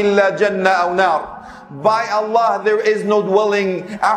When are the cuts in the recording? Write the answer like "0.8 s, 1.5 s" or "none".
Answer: none